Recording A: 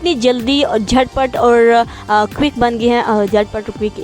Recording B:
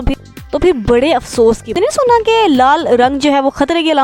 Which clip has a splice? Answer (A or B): B